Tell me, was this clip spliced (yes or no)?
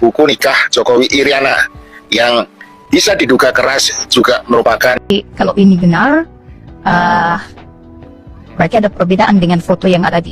yes